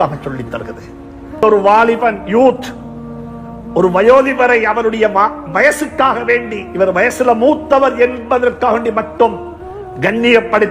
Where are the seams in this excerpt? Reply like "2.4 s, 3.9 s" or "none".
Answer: 1.4 s

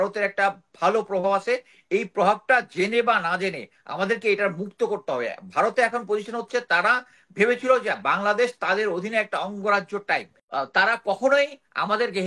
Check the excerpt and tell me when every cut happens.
10.4 s

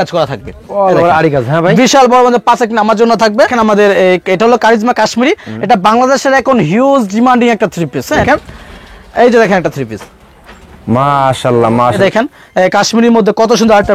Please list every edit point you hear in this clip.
3.5 s, 8.2 s, 12.0 s

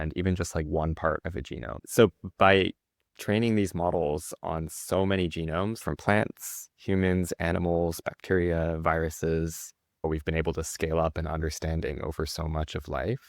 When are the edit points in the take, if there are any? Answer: 1.8 s, 5.8 s, 10.0 s

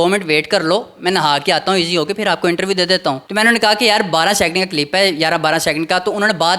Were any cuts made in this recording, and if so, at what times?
3.2 s

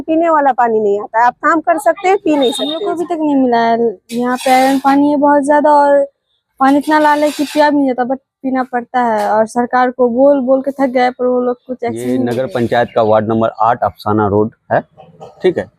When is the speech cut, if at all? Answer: 2.9 s, 12.2 s

